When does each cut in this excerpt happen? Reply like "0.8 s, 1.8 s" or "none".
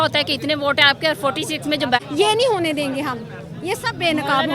2.0 s